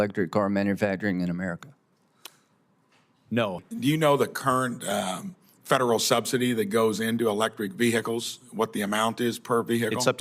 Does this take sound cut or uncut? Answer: cut